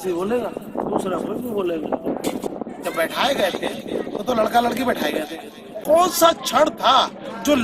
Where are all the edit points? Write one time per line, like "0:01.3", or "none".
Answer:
0:02.5
0:05.8